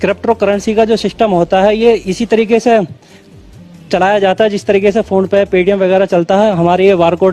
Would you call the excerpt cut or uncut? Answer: uncut